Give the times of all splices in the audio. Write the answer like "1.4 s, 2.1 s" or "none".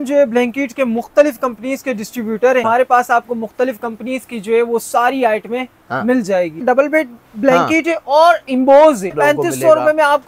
2.6 s, 6.6 s, 9.2 s